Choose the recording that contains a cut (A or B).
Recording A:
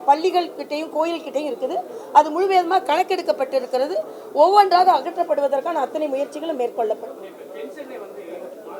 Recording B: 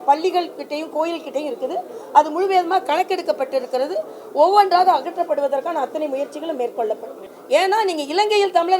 B